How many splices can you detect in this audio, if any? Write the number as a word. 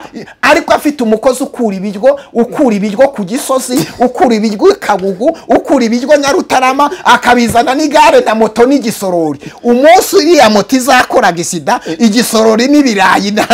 zero